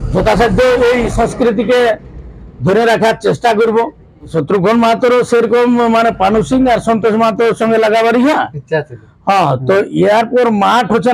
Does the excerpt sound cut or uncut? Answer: cut